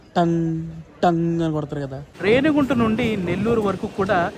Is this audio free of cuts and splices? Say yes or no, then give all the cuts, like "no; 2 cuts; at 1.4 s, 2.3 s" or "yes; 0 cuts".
no; 1 cut; at 2.0 s